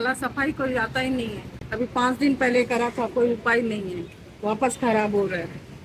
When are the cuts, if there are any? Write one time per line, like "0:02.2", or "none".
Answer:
none